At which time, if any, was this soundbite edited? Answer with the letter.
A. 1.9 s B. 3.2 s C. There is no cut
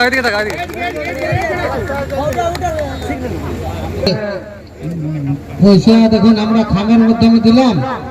B